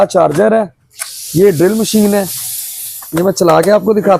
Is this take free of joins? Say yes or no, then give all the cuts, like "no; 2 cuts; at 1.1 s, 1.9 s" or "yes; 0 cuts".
yes; 0 cuts